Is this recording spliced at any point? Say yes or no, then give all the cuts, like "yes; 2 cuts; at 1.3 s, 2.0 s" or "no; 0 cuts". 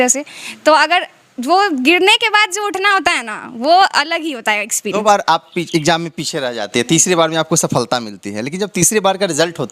yes; 1 cut; at 5.0 s